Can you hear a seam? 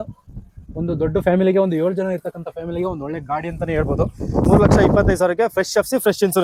yes; 1 cut; at 4.5 s

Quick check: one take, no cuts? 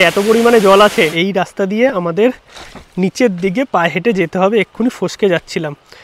no; 1 cut; at 1.2 s

